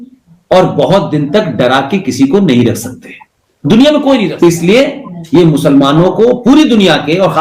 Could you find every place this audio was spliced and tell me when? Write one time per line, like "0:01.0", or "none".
0:04.3

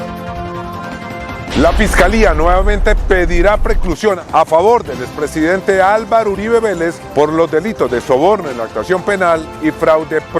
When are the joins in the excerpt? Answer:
0:01.4

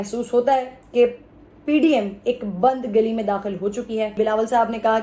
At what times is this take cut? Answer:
0:04.1

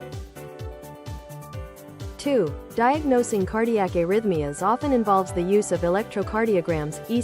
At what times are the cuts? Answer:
0:02.2

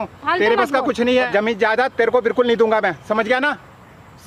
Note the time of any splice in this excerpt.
none

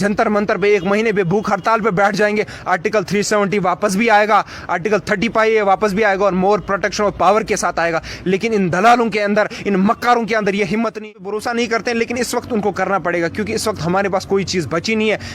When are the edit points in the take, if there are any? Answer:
0:11.0

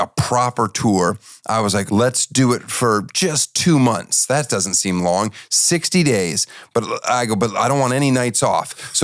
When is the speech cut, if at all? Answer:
0:01.9

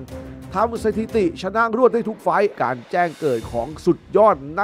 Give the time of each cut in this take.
0:02.5

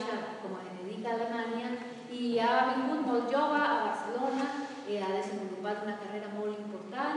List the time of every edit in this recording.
0:03.0

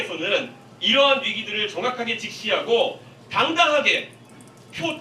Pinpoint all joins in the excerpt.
none

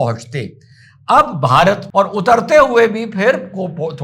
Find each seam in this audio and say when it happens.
0:01.8

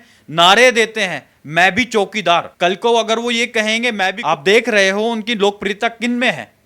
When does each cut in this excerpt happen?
0:02.5
0:04.2

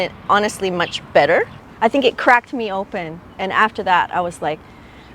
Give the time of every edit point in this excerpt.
0:01.6

